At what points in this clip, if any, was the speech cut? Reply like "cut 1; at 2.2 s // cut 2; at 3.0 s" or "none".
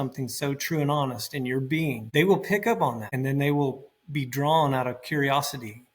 cut 1; at 2.0 s // cut 2; at 3.1 s